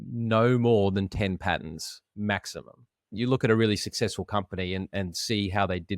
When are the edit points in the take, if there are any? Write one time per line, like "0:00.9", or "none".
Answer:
0:03.1